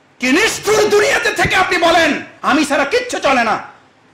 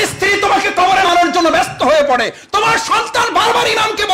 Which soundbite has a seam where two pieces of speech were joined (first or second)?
second